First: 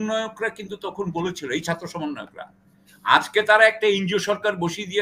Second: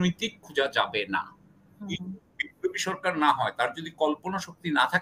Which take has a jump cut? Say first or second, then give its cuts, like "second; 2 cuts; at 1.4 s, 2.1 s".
second; 1 cut; at 1.9 s